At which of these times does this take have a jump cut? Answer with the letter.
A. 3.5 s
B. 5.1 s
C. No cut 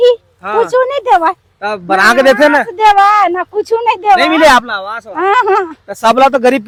C